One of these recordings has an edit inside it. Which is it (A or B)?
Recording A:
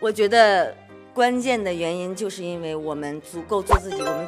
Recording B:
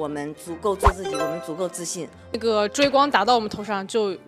B